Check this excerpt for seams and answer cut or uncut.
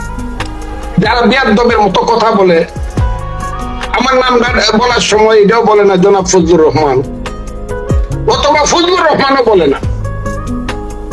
cut